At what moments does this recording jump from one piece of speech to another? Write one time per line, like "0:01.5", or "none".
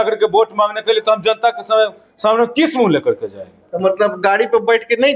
none